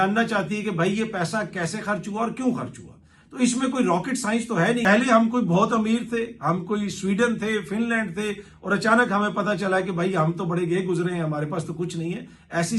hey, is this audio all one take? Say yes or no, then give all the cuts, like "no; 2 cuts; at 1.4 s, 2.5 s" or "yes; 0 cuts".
no; 1 cut; at 4.8 s